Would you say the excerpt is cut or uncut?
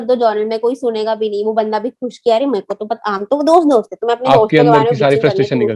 uncut